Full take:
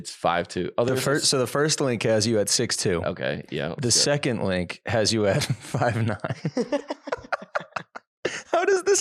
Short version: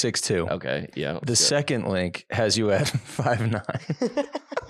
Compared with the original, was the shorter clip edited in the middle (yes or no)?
no